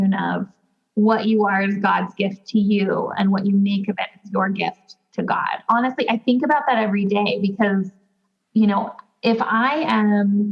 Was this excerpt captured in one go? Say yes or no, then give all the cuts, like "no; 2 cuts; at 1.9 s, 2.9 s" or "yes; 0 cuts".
no; 1 cut; at 5.6 s